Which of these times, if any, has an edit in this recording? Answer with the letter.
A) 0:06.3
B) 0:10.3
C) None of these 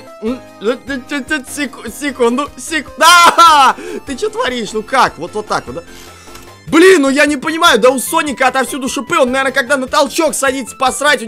C